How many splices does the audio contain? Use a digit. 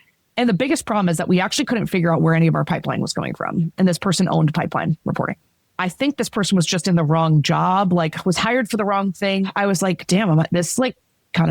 2